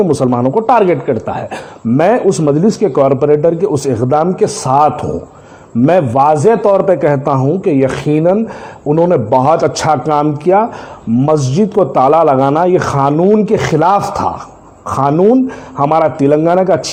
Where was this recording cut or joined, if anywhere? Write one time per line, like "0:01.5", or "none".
none